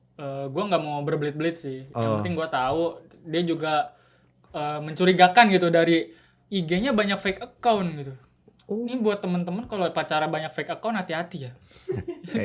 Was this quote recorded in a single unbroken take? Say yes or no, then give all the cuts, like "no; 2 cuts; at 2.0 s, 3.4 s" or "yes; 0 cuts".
yes; 0 cuts